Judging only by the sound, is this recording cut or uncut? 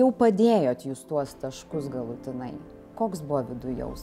uncut